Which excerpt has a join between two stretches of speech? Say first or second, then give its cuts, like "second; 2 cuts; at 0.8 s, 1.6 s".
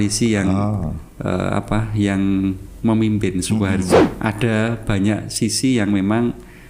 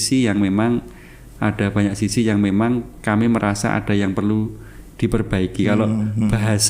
first; 1 cut; at 4.0 s